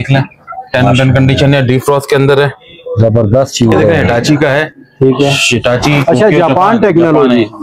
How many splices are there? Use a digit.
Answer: 1